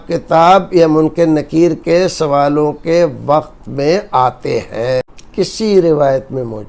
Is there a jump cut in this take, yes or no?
yes